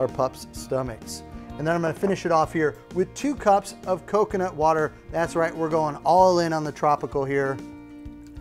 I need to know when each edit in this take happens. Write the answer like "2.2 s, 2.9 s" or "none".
5.3 s